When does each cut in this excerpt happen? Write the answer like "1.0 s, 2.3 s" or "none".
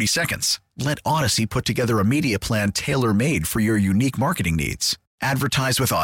none